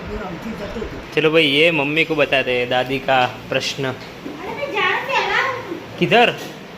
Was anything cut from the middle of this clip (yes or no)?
yes